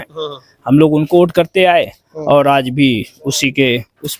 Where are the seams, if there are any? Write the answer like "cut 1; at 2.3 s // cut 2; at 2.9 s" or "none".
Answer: none